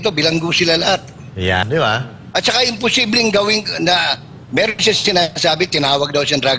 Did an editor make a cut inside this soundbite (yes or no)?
yes